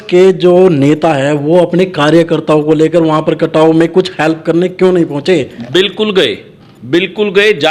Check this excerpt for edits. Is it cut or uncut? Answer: uncut